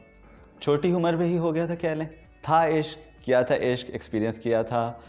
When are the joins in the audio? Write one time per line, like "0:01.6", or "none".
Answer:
0:02.2